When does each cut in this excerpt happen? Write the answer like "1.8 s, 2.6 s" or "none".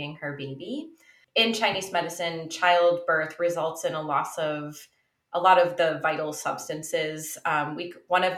1.1 s